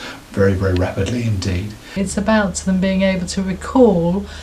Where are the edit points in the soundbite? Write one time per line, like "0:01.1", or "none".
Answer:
0:01.9